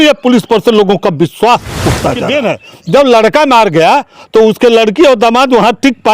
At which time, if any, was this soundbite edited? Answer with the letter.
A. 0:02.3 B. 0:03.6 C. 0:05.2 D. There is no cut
A